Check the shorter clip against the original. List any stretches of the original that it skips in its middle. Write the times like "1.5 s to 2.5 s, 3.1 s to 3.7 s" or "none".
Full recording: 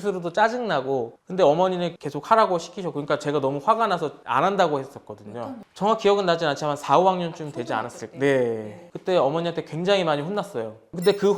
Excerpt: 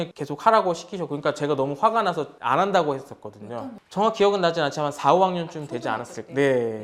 none